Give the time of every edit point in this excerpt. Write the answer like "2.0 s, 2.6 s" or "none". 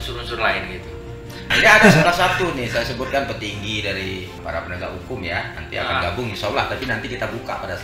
1.4 s, 4.3 s